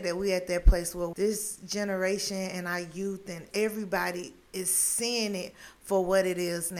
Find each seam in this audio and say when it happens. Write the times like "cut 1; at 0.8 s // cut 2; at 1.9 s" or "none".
cut 1; at 1.1 s // cut 2; at 3.4 s